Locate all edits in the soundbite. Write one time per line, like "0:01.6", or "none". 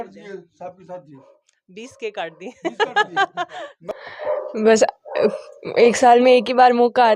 0:03.8